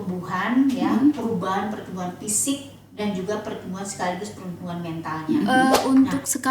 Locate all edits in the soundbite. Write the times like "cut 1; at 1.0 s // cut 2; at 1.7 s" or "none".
cut 1; at 5.5 s